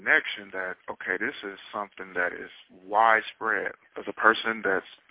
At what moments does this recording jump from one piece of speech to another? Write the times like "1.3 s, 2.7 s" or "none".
3.8 s